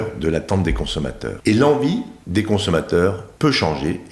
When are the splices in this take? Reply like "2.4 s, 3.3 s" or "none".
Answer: 1.3 s, 2.2 s, 3.3 s